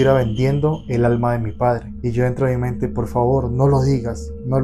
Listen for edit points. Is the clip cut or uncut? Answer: cut